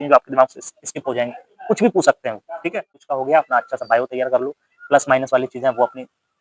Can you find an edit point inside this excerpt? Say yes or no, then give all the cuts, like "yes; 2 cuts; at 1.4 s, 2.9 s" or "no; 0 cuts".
yes; 1 cut; at 3.1 s